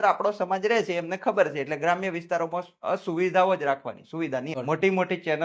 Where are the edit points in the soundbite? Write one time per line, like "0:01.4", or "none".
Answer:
0:04.5